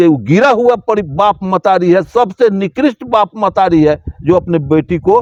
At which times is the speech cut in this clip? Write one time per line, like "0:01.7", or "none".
none